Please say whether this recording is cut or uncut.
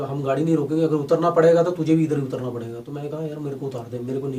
uncut